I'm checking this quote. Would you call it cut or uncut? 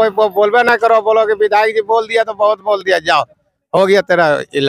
uncut